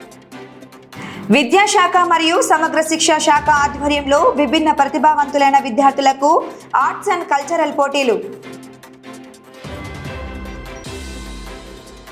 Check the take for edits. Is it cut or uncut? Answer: uncut